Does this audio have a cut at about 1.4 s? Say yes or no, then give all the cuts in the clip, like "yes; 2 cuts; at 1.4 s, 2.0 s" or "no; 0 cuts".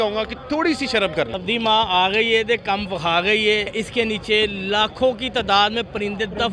yes; 2 cuts; at 1.4 s, 3.7 s